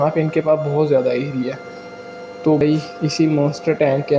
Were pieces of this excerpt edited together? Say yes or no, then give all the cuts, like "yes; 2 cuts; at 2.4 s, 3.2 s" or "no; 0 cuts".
yes; 1 cut; at 2.6 s